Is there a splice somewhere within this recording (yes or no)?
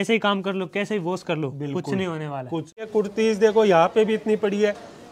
yes